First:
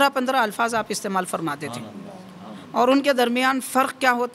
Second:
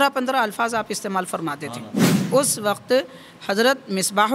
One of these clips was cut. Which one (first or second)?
second